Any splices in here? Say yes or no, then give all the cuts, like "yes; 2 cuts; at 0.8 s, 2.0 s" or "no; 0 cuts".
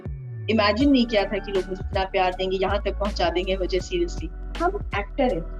yes; 1 cut; at 4.5 s